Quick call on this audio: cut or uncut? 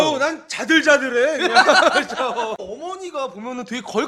cut